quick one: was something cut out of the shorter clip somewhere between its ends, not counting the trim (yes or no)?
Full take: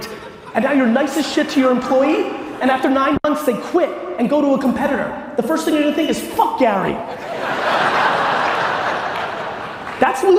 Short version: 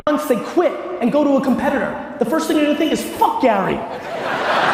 no